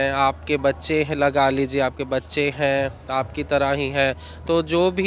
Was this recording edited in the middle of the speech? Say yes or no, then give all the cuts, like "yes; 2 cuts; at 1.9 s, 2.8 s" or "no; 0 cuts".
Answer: no; 0 cuts